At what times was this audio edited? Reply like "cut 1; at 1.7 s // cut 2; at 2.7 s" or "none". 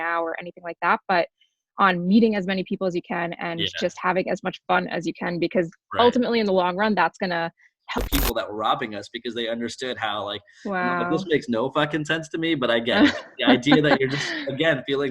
cut 1; at 7.9 s